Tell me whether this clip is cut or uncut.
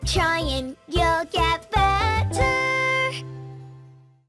uncut